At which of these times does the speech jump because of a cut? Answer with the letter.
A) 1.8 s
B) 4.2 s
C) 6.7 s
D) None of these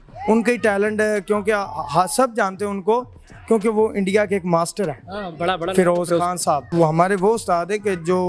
C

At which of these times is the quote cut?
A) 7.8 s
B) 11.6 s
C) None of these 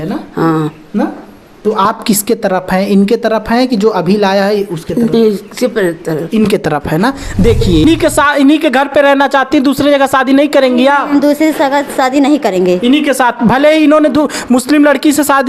A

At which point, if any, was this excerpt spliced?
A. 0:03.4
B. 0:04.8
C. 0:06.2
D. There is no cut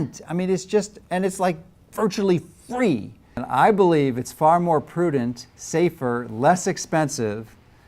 A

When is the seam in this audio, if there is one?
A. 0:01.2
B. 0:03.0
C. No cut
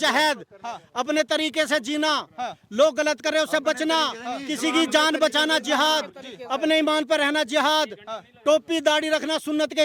C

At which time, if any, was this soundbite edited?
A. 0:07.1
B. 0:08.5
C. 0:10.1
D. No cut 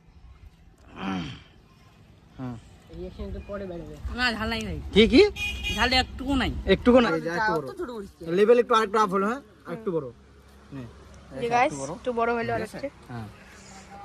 A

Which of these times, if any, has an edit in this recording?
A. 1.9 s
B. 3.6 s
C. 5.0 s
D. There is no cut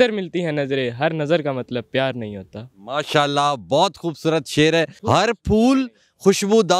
D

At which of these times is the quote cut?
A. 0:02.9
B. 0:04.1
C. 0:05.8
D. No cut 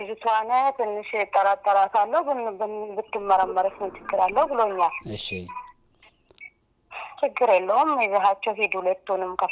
D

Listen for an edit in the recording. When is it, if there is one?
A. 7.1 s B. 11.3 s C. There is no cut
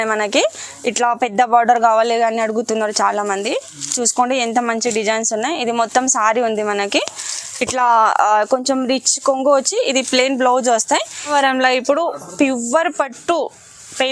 B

